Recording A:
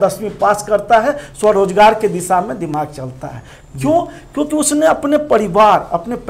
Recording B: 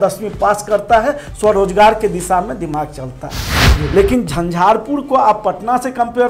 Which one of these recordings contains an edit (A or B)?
B